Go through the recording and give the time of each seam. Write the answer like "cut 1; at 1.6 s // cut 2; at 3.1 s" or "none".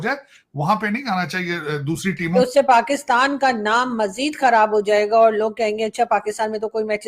cut 1; at 2.2 s